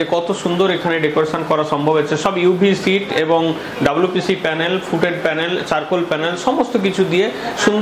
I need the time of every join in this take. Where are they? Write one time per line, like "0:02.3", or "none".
none